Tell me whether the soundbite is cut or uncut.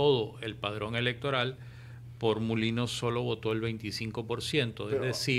uncut